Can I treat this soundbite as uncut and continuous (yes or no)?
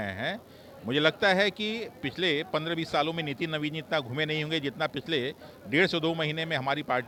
yes